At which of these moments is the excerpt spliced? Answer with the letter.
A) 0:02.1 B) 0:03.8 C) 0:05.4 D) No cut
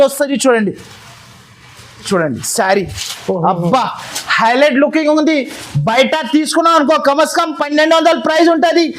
A